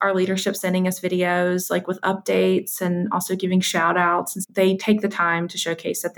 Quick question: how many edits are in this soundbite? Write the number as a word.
one